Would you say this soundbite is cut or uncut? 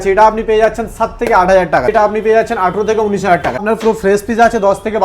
cut